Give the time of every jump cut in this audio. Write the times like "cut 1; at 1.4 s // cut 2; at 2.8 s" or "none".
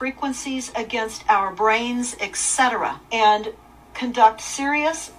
cut 1; at 3.0 s